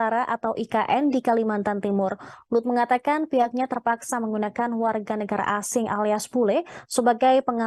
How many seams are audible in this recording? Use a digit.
0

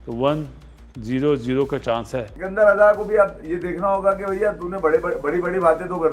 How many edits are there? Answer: 0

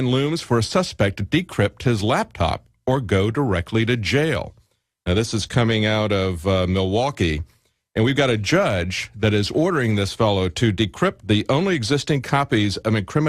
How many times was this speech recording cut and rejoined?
0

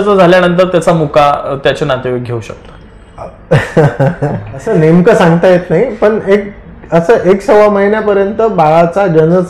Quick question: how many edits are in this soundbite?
1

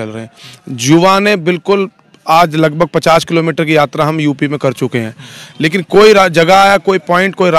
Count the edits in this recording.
0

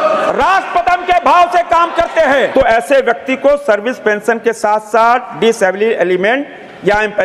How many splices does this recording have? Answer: 1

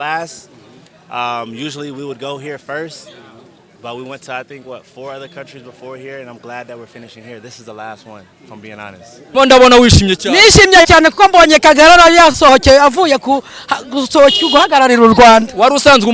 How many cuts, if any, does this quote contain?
1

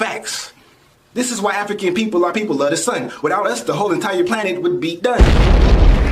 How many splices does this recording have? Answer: 1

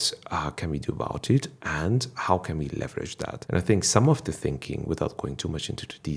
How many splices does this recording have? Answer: 1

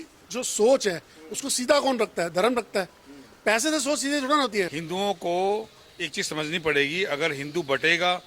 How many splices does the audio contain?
1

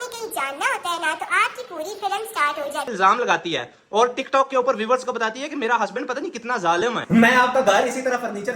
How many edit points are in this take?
2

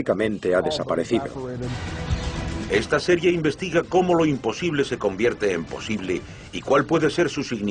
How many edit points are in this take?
1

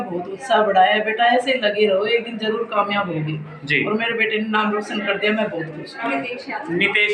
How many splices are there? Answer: 1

